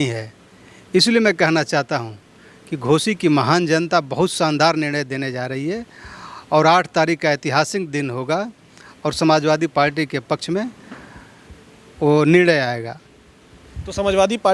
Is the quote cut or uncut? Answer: uncut